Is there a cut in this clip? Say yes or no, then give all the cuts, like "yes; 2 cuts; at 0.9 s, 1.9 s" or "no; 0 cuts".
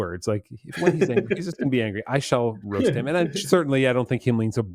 no; 0 cuts